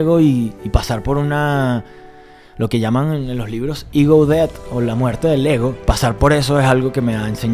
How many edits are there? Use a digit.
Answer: 1